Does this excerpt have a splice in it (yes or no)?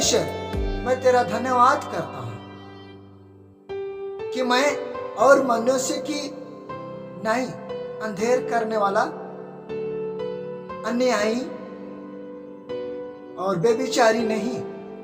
yes